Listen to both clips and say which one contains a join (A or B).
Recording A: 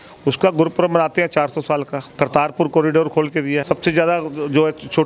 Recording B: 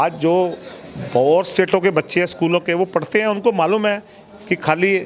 A